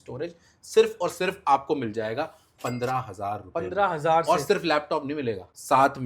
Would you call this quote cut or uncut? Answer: uncut